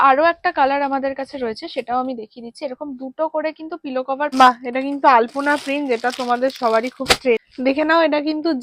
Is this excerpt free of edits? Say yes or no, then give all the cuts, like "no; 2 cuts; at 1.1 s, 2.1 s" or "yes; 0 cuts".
no; 2 cuts; at 4.3 s, 7.5 s